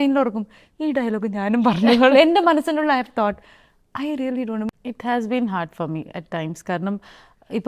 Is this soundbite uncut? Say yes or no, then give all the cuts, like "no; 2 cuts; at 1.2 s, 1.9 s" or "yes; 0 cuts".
no; 1 cut; at 4.7 s